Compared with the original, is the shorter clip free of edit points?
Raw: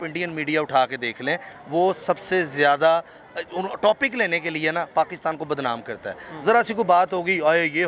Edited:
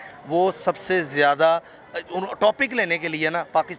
yes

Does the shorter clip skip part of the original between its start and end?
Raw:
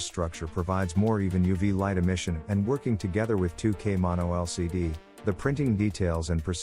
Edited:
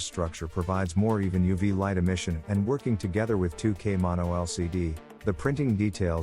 no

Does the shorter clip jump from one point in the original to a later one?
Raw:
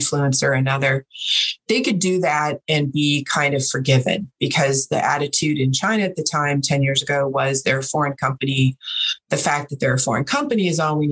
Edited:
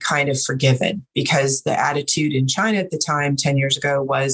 no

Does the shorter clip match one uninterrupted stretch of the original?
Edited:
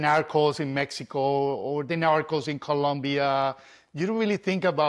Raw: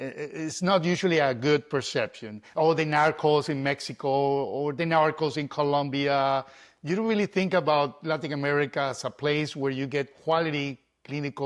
yes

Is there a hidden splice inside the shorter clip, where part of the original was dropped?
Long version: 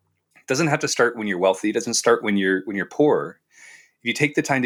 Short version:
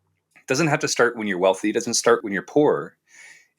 yes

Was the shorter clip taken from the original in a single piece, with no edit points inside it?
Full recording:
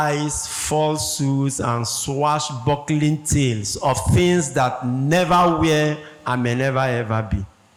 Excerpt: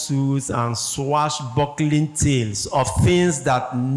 yes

